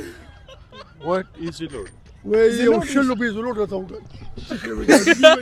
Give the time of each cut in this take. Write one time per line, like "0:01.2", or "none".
none